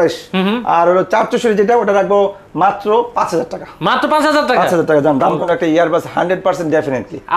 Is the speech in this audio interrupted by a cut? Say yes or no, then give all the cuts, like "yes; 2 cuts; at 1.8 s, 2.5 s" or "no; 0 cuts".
yes; 1 cut; at 5.4 s